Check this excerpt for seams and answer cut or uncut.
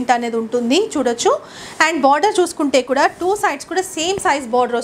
uncut